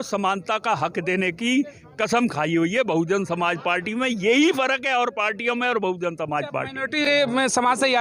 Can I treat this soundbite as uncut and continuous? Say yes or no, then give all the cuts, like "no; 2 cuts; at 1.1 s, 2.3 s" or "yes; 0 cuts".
yes; 0 cuts